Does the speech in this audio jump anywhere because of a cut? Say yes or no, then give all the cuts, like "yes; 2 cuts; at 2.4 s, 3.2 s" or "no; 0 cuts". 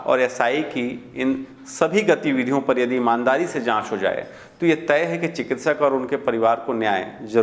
no; 0 cuts